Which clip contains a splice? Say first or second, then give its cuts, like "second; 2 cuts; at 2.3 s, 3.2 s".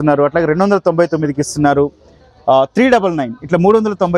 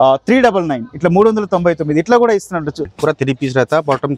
second; 1 cut; at 2.9 s